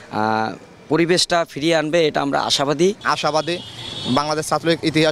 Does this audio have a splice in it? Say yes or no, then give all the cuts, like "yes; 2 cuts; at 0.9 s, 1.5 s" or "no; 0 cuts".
no; 0 cuts